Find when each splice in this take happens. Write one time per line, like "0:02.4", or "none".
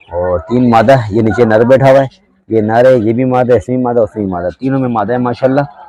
none